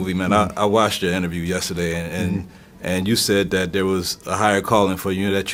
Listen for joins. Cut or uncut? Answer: uncut